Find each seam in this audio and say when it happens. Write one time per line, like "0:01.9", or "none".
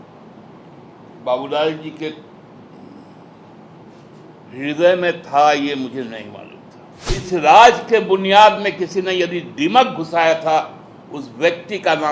0:07.2